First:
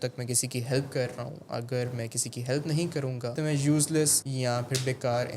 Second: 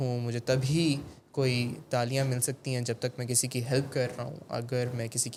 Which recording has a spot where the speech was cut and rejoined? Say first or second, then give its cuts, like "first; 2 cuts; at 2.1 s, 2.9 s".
first; 2 cuts; at 3.3 s, 4.2 s